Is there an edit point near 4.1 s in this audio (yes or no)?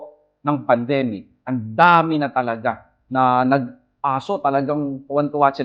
no